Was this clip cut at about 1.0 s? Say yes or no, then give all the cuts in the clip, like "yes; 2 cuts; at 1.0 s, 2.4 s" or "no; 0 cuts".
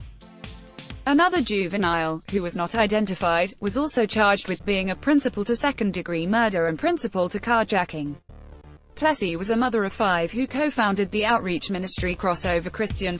yes; 1 cut; at 1.0 s